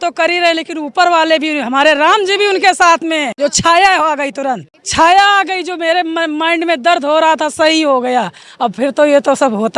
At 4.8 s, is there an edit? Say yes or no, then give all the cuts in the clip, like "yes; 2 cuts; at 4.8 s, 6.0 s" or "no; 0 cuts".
yes; 2 cuts; at 3.3 s, 4.8 s